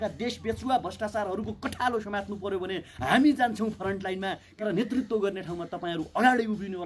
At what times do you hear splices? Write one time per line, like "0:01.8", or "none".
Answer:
0:04.6